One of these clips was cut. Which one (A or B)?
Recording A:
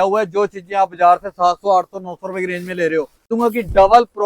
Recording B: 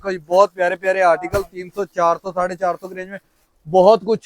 A